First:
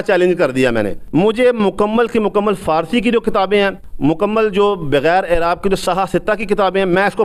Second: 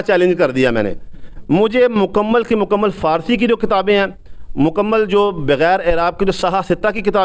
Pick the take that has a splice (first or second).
first